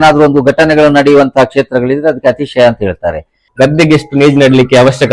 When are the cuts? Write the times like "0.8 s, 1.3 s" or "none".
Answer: 3.4 s

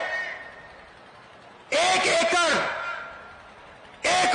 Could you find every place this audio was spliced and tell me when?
none

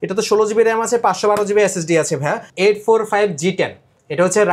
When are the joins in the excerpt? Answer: 2.5 s

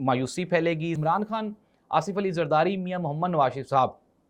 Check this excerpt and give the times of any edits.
1.0 s

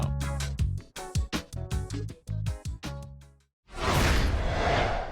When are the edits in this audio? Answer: 3.7 s

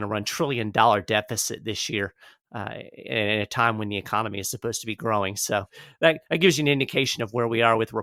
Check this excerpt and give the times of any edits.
none

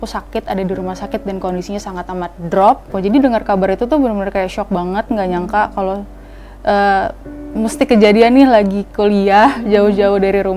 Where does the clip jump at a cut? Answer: 2.9 s

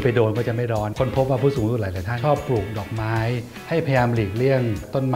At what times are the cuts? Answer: 0.9 s, 2.1 s, 3.5 s

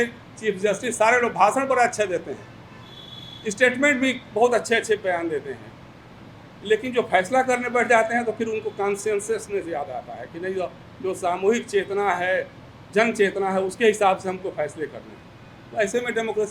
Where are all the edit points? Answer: none

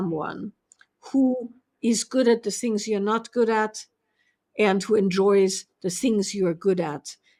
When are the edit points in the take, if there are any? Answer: none

